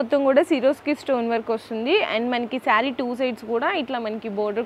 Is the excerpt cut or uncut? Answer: uncut